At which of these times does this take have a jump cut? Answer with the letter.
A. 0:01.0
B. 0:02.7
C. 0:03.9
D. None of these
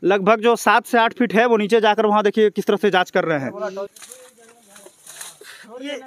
C